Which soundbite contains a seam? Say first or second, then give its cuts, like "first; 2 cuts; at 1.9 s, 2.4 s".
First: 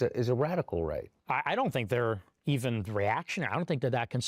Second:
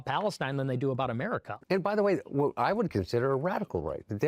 second; 1 cut; at 1.5 s